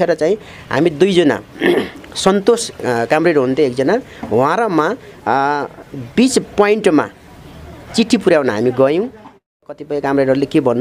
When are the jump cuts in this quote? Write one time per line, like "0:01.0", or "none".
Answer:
0:09.5